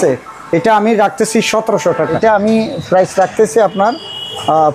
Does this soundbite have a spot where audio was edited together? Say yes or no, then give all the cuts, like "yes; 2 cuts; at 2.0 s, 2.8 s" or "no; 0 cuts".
yes; 1 cut; at 2.0 s